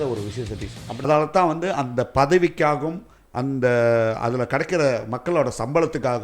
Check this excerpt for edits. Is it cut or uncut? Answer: cut